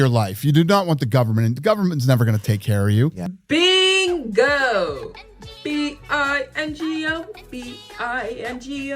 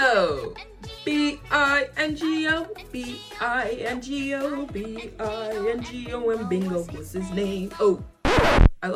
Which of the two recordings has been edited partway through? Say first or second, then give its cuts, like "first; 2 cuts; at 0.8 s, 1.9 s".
first; 1 cut; at 3.4 s